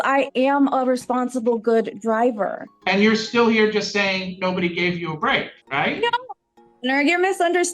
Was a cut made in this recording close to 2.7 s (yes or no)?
yes